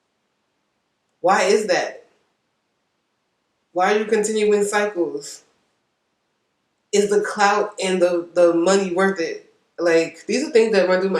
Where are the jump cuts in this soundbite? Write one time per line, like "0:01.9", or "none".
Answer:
0:10.2